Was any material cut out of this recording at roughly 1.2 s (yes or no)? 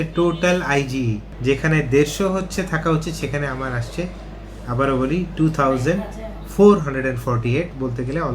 yes